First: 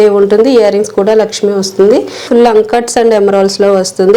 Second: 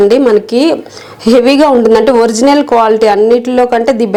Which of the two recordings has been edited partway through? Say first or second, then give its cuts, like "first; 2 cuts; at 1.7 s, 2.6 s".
first; 1 cut; at 2.3 s